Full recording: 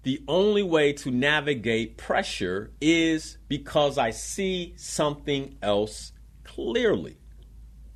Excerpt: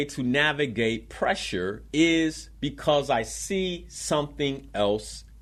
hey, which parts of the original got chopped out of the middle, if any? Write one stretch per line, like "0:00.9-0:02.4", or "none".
none